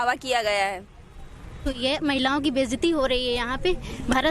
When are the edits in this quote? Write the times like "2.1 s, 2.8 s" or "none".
1.7 s